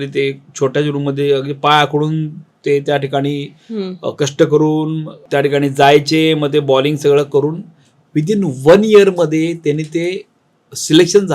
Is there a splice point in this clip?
no; 0 cuts

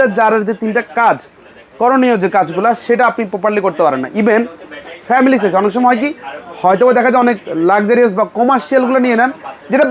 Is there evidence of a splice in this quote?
no; 0 cuts

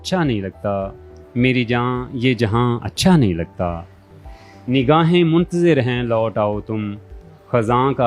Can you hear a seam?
no; 0 cuts

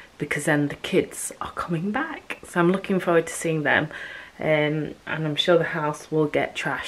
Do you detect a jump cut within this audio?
no; 0 cuts

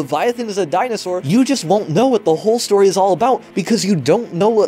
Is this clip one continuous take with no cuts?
no; 1 cut; at 1.2 s

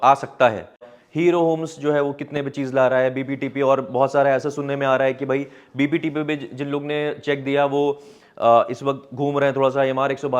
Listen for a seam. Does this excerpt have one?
yes; 1 cut; at 0.9 s

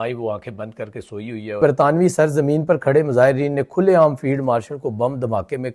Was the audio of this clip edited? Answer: yes; 1 cut; at 1.6 s

